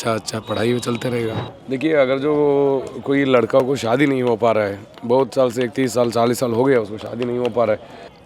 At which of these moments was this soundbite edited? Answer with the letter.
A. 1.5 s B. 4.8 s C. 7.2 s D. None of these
A